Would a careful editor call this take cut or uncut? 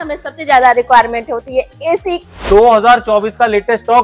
cut